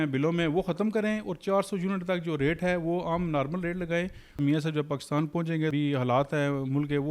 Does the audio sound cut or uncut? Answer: cut